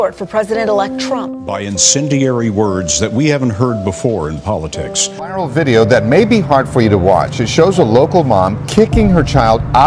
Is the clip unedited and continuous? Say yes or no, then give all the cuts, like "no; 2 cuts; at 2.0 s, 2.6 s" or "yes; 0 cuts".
no; 1 cut; at 8.6 s